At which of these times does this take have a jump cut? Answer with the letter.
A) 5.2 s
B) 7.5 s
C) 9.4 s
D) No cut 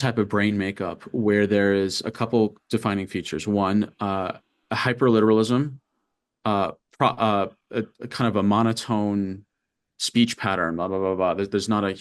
D